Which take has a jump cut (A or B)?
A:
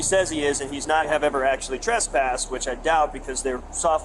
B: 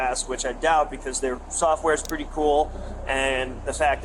A